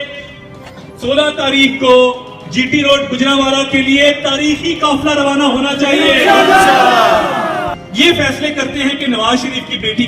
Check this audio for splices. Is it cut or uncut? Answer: cut